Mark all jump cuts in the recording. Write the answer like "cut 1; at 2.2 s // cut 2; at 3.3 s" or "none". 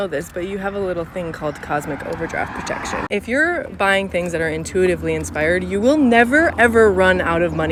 none